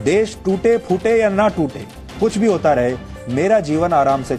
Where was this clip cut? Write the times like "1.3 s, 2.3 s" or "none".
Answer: none